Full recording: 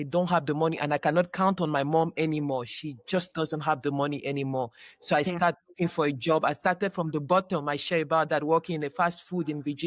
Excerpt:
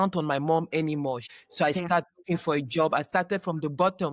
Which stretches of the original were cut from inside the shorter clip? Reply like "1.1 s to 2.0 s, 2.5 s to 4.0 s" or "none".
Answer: 2.8 s to 4.9 s